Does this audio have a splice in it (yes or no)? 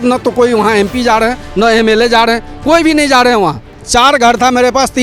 yes